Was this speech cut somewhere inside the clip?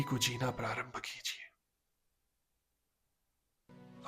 no; 0 cuts

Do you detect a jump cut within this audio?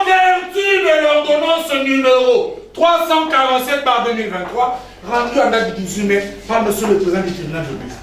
no; 0 cuts

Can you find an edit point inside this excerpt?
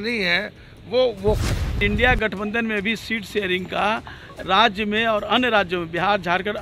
yes; 1 cut; at 1.8 s

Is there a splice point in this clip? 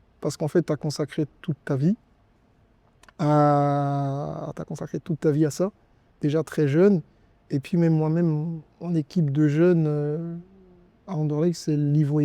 no; 0 cuts

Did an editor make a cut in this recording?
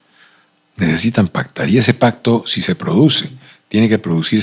no; 0 cuts

